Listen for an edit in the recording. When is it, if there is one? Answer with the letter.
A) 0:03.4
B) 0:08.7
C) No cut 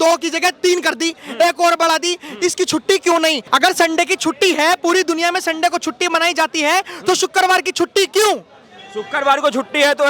A